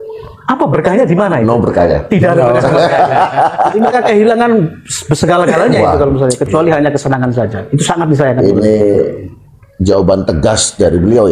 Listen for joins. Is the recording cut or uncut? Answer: uncut